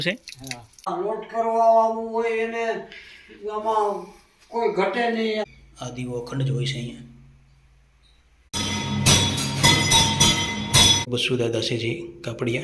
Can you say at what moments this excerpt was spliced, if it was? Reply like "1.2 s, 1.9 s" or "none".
0.9 s, 5.4 s, 8.5 s, 11.0 s